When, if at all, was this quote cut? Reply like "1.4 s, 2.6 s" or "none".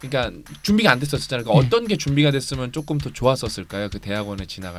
none